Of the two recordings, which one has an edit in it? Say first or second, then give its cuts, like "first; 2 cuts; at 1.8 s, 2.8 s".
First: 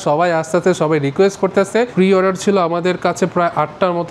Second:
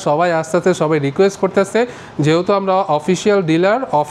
first; 1 cut; at 1.9 s